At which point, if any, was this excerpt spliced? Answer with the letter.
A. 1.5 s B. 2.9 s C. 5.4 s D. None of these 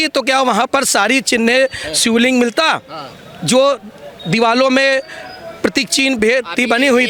D